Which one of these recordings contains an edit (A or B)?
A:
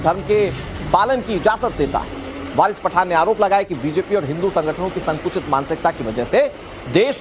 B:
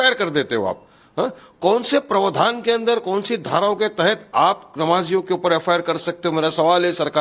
A